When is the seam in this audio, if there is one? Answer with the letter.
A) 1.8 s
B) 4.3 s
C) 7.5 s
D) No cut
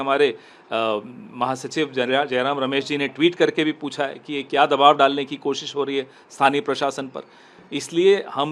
D